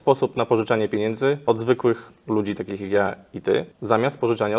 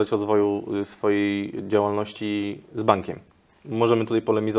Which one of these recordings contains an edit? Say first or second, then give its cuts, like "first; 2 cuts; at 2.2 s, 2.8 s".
first; 2 cuts; at 1.4 s, 3.7 s